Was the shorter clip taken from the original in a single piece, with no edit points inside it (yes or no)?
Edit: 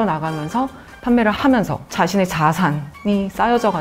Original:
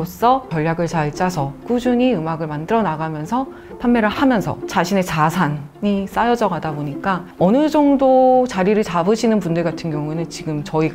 yes